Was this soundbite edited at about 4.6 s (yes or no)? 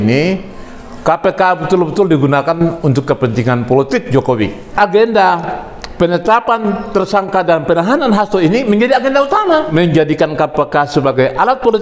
yes